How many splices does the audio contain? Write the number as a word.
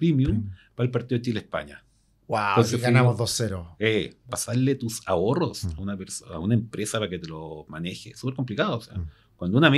one